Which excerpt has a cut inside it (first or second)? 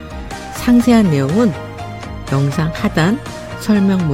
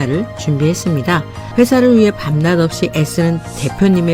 second